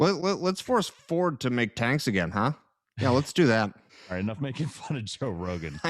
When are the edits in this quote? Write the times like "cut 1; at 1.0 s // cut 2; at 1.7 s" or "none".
cut 1; at 3.9 s